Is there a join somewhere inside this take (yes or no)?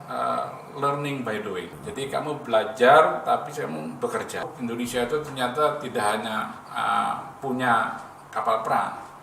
yes